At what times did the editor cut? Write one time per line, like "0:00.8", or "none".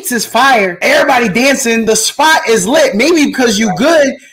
0:00.8
0:01.8